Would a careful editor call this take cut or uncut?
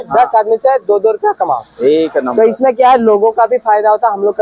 uncut